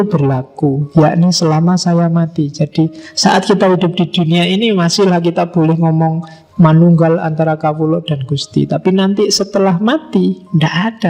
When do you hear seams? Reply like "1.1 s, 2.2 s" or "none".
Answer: none